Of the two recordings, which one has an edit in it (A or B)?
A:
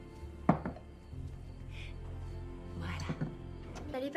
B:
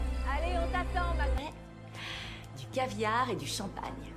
B